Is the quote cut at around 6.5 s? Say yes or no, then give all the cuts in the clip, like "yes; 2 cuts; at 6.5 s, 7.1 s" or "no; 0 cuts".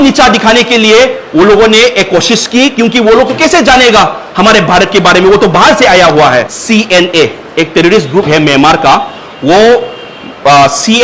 yes; 1 cut; at 6.5 s